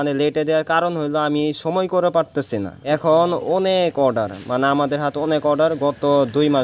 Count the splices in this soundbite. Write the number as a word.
one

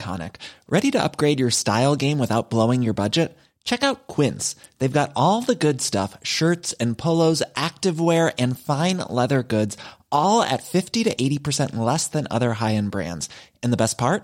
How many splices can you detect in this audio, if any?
zero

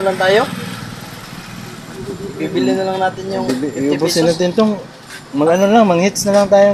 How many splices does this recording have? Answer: zero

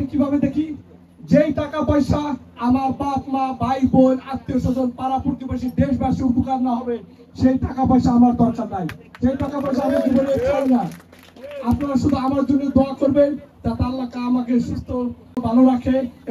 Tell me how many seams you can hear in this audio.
one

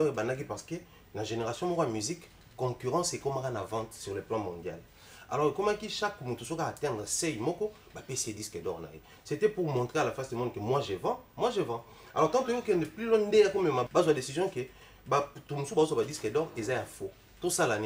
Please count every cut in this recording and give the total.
one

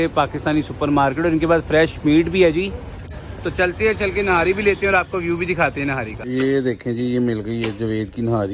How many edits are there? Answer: zero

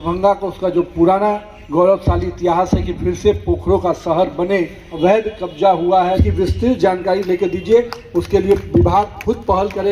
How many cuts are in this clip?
three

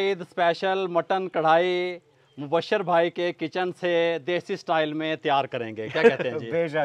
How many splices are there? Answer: zero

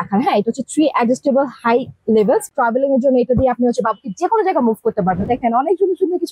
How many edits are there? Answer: two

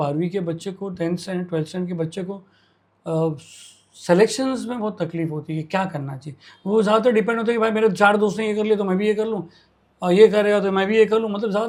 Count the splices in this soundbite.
zero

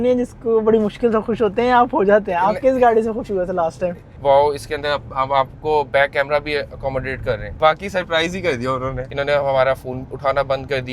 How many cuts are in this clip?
three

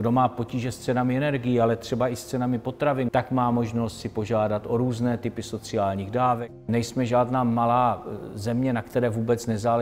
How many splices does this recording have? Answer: two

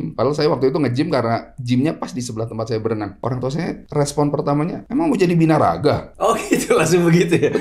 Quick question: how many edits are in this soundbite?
one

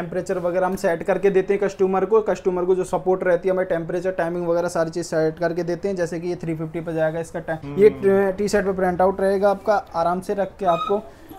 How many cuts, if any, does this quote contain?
one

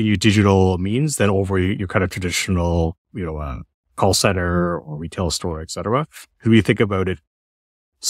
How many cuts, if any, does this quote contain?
one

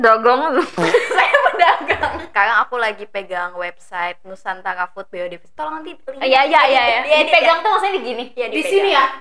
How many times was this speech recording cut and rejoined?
one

